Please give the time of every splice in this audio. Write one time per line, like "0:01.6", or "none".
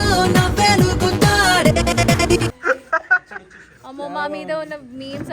0:02.5

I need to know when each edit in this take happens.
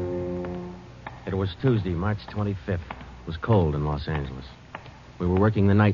0:03.4

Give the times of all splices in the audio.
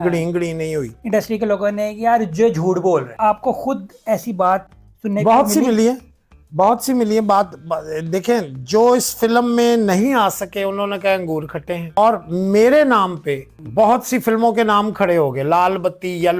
0:01.0
0:03.1
0:11.9
0:13.5

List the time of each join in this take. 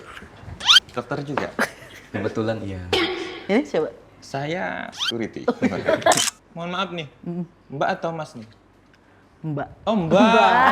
0:06.2

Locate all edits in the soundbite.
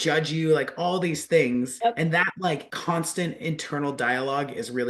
0:01.3
0:02.7

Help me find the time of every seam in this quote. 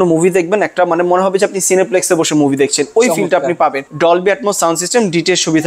0:03.8

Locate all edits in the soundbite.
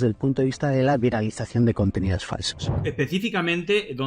0:02.8

